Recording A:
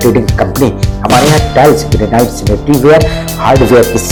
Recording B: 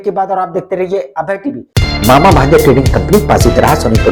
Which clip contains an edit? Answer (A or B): B